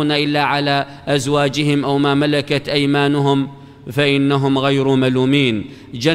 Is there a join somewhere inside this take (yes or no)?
yes